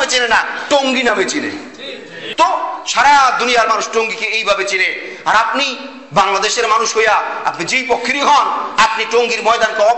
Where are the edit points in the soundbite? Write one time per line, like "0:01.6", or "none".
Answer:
0:02.2